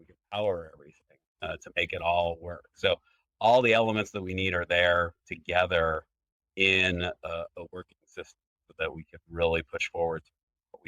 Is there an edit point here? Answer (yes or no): no